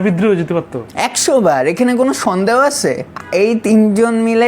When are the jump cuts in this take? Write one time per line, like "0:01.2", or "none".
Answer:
0:03.1